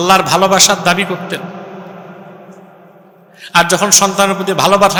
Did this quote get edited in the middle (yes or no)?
no